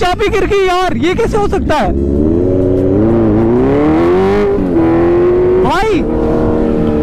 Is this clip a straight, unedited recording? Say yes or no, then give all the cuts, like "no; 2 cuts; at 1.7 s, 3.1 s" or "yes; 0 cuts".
yes; 0 cuts